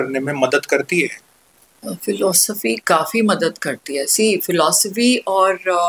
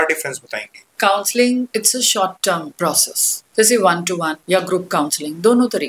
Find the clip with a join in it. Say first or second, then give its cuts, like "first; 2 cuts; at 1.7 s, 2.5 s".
second; 4 cuts; at 0.9 s, 1.7 s, 2.8 s, 4.3 s